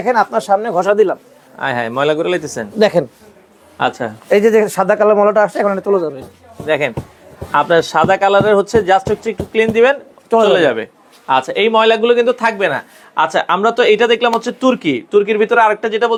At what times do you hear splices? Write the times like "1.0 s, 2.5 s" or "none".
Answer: none